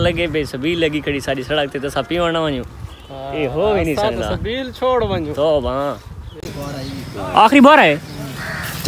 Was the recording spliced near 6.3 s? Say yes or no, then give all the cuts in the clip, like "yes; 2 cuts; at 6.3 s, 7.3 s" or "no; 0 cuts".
yes; 1 cut; at 6.3 s